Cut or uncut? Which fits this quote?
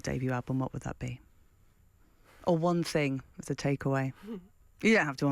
uncut